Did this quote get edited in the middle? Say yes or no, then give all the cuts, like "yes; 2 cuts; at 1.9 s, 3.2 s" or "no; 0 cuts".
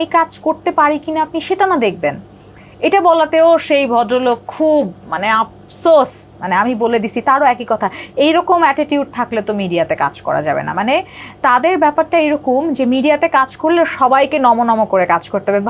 no; 0 cuts